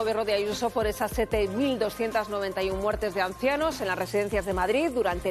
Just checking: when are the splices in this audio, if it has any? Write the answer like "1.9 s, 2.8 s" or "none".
none